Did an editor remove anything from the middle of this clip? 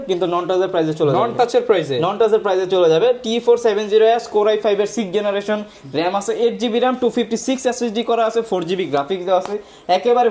no; 0 cuts

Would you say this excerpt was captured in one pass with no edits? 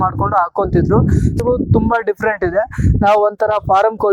no; 1 cut; at 1.4 s

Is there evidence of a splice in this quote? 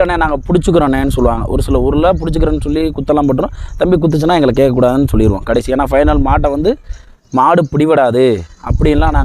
no; 0 cuts

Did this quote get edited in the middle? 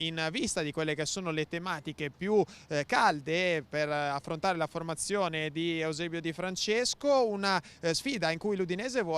yes; 1 cut; at 1.3 s

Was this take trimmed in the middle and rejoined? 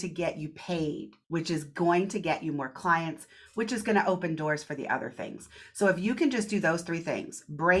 yes; 1 cut; at 1.1 s

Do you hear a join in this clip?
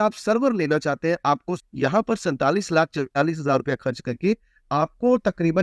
yes; 1 cut; at 1.5 s

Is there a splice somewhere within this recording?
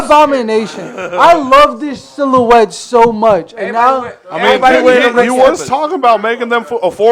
no; 0 cuts

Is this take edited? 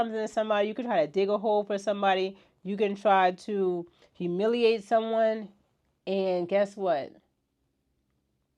no; 0 cuts

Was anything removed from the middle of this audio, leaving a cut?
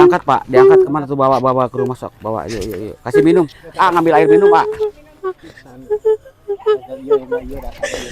no; 0 cuts

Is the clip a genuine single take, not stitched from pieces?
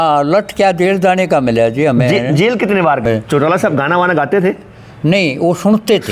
no; 1 cut; at 3.0 s

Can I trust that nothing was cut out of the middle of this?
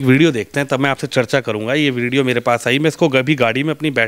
yes; 0 cuts

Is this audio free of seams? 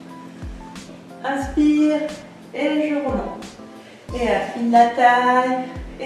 no; 1 cut; at 1.2 s

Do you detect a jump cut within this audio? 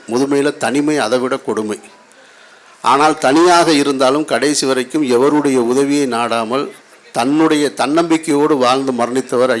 no; 0 cuts

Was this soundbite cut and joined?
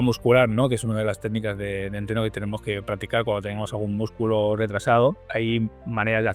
yes; 1 cut; at 5.2 s

